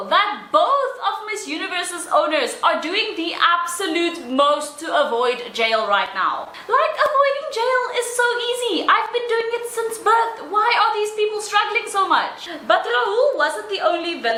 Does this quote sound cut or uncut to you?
uncut